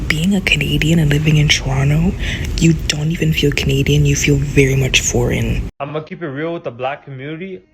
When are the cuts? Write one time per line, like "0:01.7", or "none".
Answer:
0:05.7

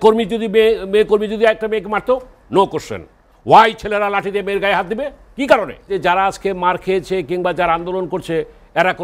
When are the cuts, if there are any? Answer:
0:05.9

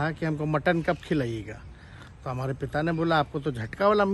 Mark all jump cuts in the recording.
none

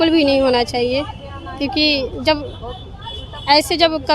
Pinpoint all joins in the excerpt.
none

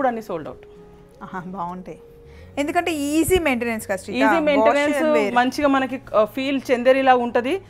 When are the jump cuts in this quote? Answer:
none

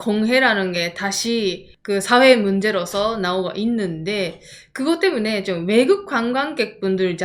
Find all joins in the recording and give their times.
none

